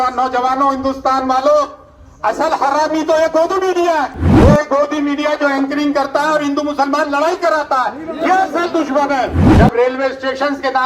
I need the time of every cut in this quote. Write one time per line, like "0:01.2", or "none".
0:04.2
0:09.4